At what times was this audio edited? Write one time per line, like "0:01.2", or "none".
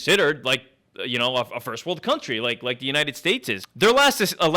0:03.6